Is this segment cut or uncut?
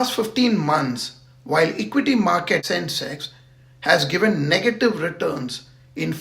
cut